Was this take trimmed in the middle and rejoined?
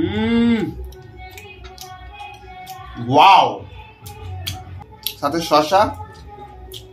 no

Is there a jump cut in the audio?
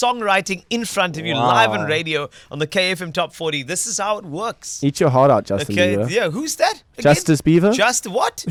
no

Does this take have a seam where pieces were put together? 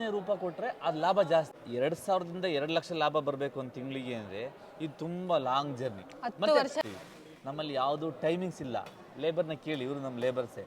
yes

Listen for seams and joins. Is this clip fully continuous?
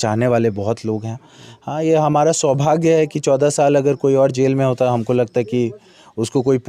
yes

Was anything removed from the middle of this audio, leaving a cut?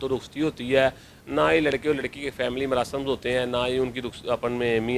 no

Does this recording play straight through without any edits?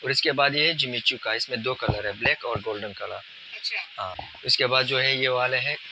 no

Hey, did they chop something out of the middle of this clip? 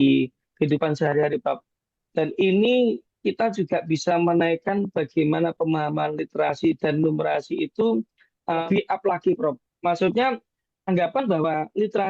yes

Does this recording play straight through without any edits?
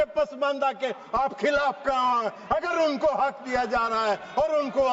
yes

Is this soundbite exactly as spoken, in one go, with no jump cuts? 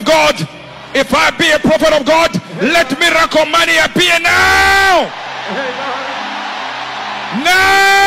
yes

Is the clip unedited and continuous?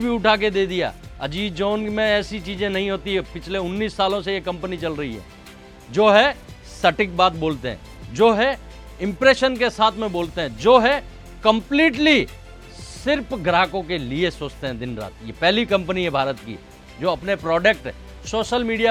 yes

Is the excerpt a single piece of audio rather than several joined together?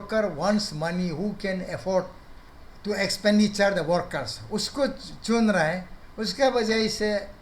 yes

